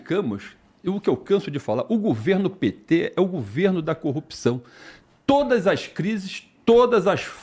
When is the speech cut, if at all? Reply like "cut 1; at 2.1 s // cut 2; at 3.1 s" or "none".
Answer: none